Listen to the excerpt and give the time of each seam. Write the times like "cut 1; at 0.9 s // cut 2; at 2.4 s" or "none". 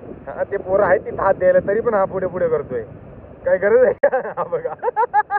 none